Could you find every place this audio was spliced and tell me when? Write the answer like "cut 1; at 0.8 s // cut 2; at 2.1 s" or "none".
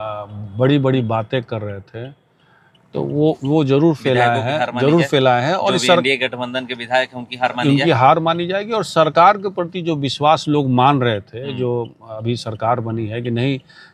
none